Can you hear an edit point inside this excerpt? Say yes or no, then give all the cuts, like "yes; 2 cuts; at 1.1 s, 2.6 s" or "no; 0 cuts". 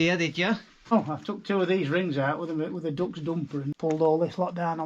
yes; 2 cuts; at 0.9 s, 3.7 s